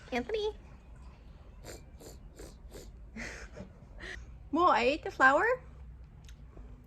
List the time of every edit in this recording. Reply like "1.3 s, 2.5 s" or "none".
4.1 s